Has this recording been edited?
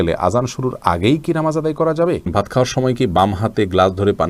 yes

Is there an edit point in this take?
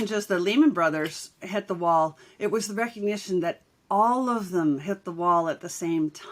no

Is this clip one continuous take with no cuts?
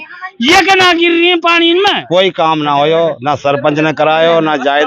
no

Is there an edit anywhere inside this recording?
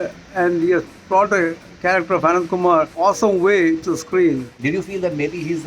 yes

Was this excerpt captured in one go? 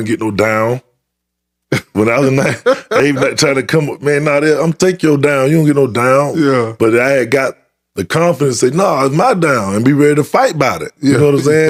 yes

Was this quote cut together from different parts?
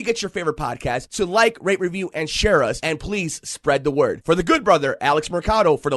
no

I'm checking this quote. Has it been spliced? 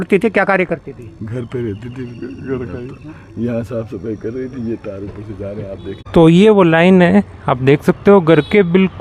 no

